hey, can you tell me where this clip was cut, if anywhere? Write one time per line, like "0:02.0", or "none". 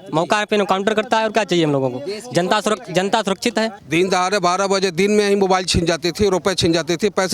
0:03.8